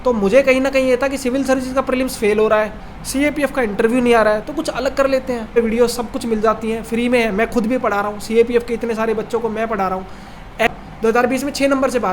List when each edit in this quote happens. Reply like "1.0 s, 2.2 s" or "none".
5.5 s, 10.7 s